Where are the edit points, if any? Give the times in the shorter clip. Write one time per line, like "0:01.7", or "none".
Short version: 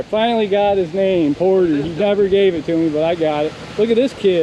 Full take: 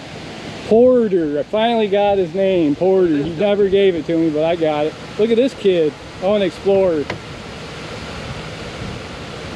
none